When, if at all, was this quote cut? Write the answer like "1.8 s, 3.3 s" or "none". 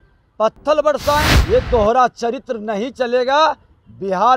1.3 s